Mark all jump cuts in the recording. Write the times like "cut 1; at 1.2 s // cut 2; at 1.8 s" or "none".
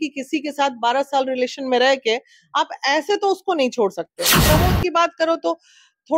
cut 1; at 4.4 s